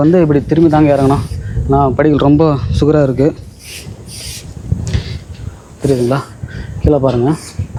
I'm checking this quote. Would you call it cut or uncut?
uncut